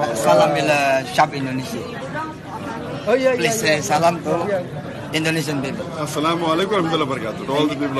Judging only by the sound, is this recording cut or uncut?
uncut